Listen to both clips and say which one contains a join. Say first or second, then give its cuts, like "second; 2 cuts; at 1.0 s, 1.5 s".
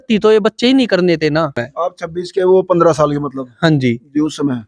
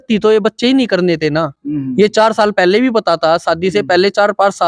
first; 1 cut; at 1.6 s